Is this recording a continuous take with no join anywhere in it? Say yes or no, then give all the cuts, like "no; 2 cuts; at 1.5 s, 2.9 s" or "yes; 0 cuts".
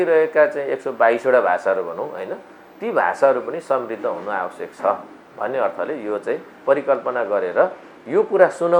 yes; 0 cuts